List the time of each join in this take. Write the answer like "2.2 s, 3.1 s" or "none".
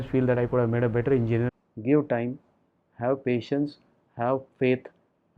1.5 s